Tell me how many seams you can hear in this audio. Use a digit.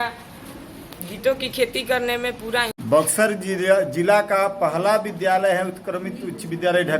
1